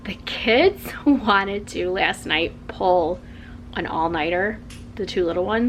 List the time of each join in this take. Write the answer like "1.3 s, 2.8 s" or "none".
none